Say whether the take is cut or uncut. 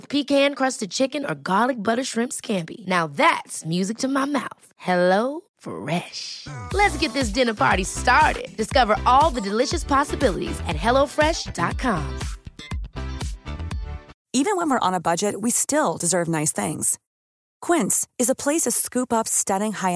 cut